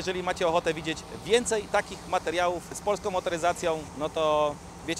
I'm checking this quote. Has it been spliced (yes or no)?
yes